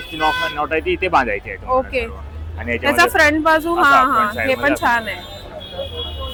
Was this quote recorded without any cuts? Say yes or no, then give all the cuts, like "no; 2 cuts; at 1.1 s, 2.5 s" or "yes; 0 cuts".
yes; 0 cuts